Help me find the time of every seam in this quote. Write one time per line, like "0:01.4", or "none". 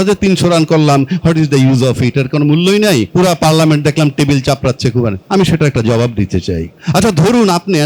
0:03.1
0:05.2
0:06.7